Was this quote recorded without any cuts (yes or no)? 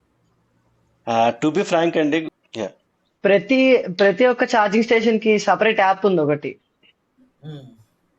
no